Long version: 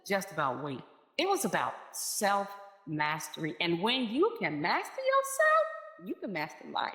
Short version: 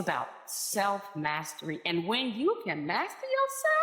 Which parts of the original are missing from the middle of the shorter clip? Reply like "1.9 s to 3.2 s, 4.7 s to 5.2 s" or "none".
2.5 s to 2.8 s